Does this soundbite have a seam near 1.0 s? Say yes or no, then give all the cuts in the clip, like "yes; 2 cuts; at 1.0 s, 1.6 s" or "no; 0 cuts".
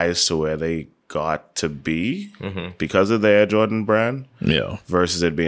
yes; 1 cut; at 1.0 s